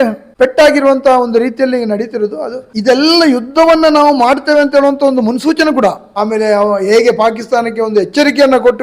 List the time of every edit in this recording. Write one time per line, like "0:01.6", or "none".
0:02.7
0:06.1